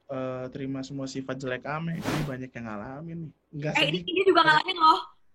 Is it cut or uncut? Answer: cut